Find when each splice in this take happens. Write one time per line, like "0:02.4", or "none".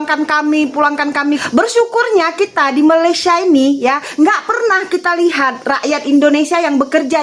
0:01.4